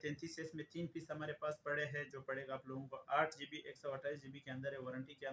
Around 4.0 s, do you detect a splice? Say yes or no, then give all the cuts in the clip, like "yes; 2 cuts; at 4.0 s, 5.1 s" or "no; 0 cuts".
no; 0 cuts